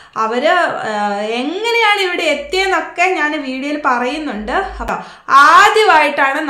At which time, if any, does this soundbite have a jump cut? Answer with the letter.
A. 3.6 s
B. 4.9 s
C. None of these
B